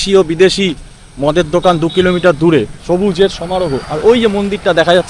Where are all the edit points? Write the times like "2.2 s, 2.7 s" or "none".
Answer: 2.8 s